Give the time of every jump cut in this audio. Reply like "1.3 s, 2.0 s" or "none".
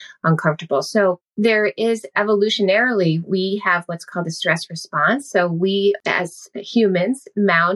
1.3 s, 6.0 s